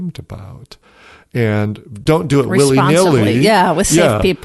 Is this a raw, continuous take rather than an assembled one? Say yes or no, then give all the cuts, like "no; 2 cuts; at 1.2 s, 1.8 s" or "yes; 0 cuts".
no; 1 cut; at 2.0 s